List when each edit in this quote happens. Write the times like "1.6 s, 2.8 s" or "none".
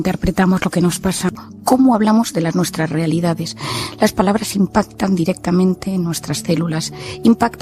1.4 s